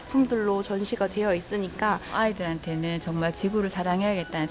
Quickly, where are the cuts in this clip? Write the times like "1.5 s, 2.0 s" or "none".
2.1 s